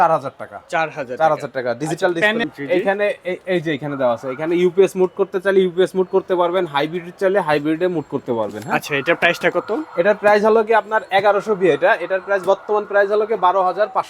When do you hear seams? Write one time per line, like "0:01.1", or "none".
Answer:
0:02.4